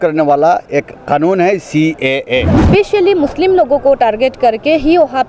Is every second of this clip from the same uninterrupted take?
no; 1 cut; at 2.6 s

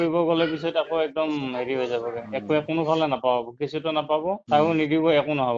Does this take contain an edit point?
yes; 1 cut; at 4.4 s

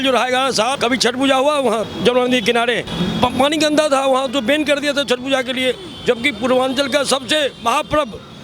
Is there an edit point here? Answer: yes; 3 cuts; at 0.8 s, 1.9 s, 2.9 s

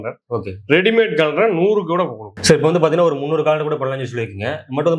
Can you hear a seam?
no; 0 cuts

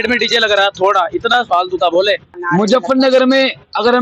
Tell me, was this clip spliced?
yes; 1 cut; at 2.3 s

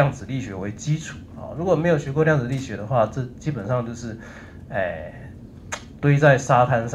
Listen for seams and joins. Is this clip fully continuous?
yes; 0 cuts

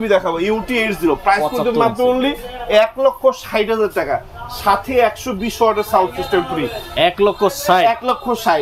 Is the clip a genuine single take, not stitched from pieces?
yes; 0 cuts

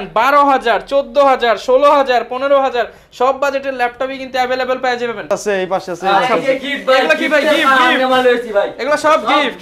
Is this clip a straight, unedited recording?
no; 1 cut; at 5.2 s

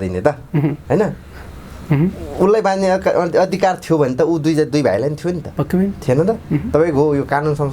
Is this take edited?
no; 0 cuts

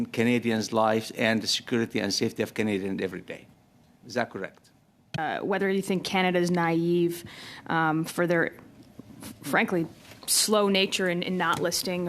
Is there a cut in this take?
yes; 1 cut; at 5.2 s

